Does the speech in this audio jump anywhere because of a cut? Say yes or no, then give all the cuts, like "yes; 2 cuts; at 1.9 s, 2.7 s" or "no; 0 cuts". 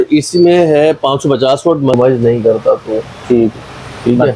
yes; 1 cut; at 2.0 s